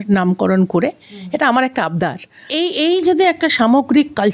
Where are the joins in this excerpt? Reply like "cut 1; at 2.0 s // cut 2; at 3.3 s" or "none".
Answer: cut 1; at 2.5 s

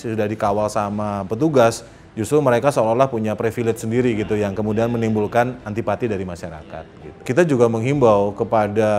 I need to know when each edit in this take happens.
cut 1; at 7.2 s

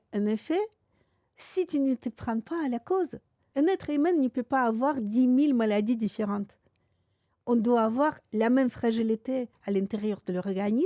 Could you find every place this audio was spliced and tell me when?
cut 1; at 3.4 s

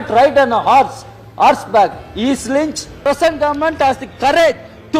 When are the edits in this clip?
cut 1; at 2.9 s

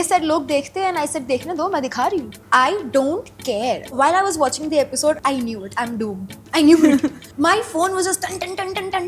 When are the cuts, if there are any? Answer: cut 1; at 2.4 s // cut 2; at 3.9 s // cut 3; at 5.2 s // cut 4; at 7.2 s

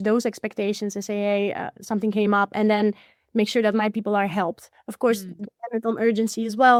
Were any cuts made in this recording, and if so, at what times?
none

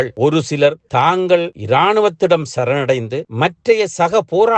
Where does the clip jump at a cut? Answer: none

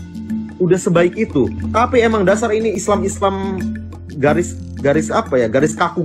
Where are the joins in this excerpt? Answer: cut 1; at 1.6 s

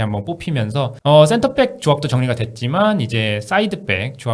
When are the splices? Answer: cut 1; at 0.9 s

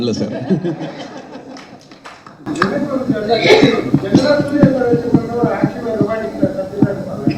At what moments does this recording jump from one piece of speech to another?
none

